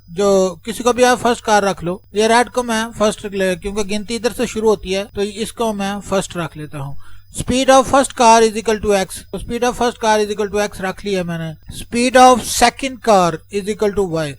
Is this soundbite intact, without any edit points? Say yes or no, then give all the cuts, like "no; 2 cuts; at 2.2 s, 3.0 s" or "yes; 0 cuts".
no; 1 cut; at 5.1 s